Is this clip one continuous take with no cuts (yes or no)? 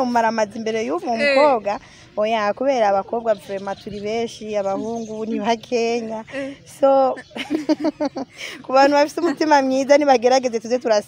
yes